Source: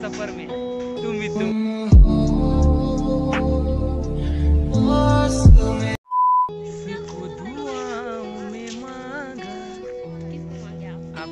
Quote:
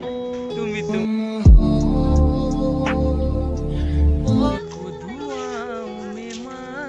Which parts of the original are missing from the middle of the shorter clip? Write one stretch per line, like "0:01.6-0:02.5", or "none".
0:05.0-0:06.9

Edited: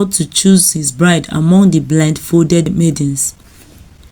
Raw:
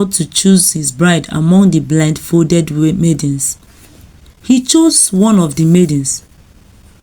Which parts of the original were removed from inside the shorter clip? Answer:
0:02.7-0:02.9

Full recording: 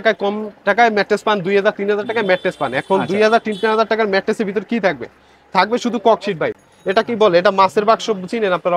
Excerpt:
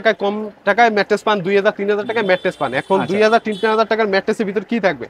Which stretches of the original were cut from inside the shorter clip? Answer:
none

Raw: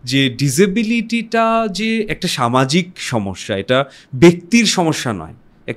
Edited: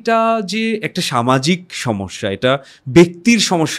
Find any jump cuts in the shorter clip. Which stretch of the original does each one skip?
none

